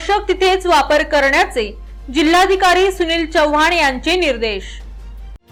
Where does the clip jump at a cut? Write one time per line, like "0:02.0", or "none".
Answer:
none